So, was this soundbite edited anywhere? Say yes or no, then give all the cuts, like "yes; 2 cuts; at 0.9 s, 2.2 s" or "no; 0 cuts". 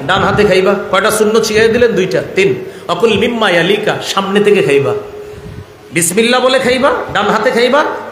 no; 0 cuts